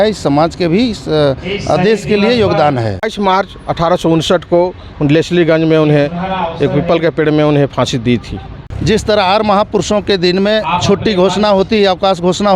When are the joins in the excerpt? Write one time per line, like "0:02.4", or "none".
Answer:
0:03.0
0:08.6